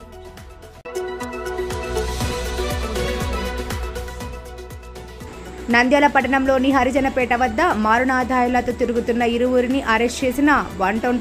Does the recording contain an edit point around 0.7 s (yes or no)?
yes